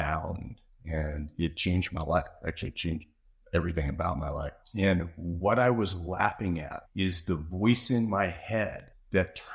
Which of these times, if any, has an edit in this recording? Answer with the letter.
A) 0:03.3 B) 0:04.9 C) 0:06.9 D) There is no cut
D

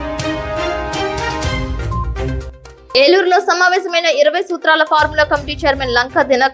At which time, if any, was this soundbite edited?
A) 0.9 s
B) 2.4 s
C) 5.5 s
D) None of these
B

